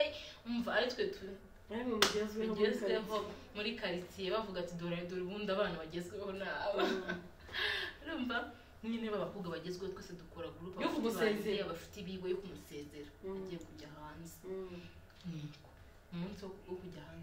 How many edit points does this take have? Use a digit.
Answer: 0